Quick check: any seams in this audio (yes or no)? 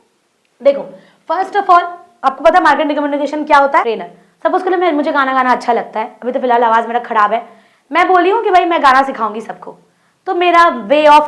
yes